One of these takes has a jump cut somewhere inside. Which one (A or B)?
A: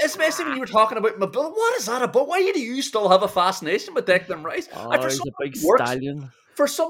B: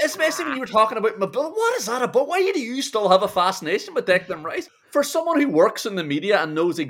B